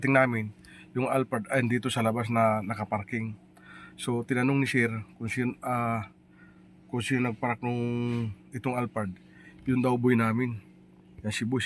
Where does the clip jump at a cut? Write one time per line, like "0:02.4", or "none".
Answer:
none